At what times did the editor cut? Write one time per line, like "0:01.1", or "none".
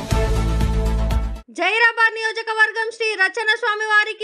none

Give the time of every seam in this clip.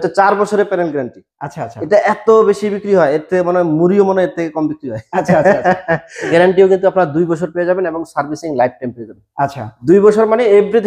0:06.3

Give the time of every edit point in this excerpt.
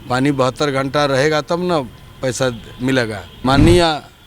0:03.3

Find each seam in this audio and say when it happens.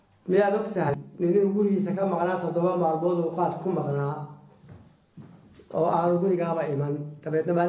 0:00.9

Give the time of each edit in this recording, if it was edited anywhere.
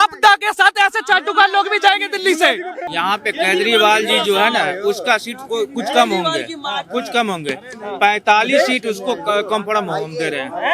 0:02.8

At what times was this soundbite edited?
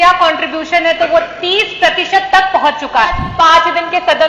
0:03.3

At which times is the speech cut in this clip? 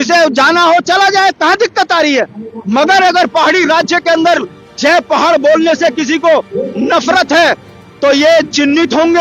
none

